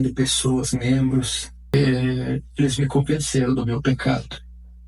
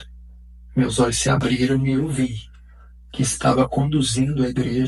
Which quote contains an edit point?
first; 1 cut; at 1.7 s

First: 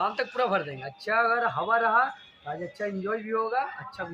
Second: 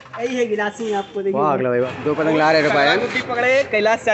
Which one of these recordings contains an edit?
second; 1 cut; at 1.9 s

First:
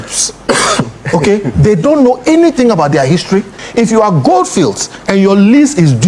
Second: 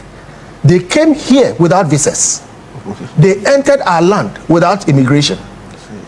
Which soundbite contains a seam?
first; 1 cut; at 3.6 s

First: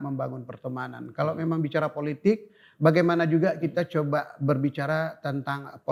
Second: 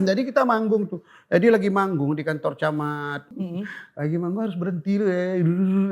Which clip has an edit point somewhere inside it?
second; 1 cut; at 3.4 s

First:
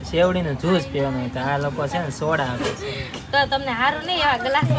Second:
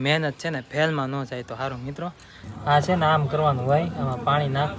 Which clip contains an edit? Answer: second; 1 cut; at 2.5 s

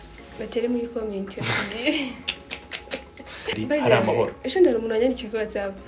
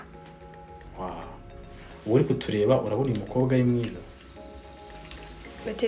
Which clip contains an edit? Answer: first; 1 cut; at 3.5 s

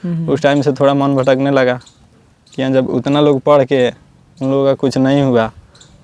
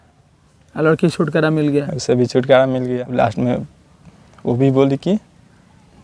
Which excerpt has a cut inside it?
second; 1 cut; at 3.0 s

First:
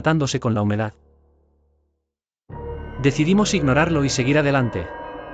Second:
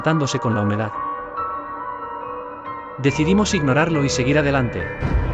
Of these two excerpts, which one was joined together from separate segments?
second; 2 cuts; at 1.0 s, 3.0 s

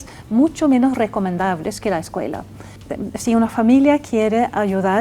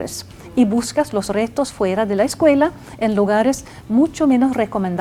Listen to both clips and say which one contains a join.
first; 1 cut; at 2.8 s

